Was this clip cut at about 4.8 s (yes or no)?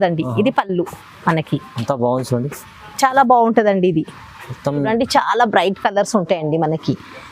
yes